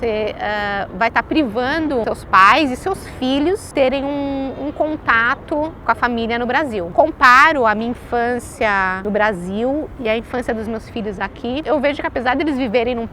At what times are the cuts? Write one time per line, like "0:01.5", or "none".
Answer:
0:02.0
0:03.7
0:05.8
0:06.9
0:09.0
0:11.6